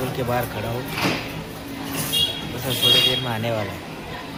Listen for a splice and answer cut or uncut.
uncut